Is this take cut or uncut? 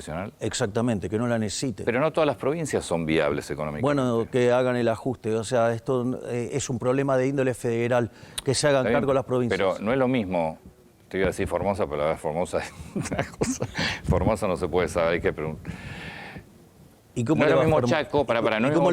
uncut